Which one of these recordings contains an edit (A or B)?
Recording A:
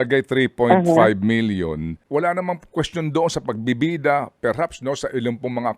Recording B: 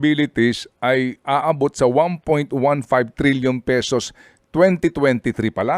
A